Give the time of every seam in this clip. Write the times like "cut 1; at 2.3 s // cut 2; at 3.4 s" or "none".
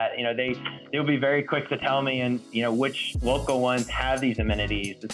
none